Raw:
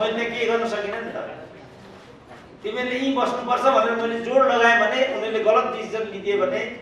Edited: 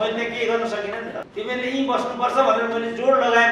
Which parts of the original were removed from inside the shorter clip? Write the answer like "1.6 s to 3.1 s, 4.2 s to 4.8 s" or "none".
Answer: 1.2 s to 2.5 s